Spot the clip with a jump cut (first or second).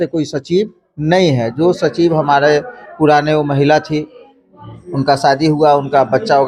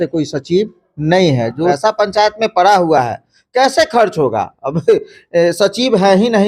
second